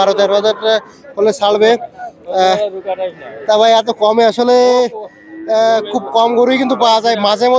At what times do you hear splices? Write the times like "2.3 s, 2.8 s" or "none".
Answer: none